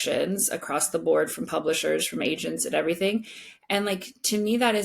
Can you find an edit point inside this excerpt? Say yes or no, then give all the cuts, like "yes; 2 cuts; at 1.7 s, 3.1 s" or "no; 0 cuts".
no; 0 cuts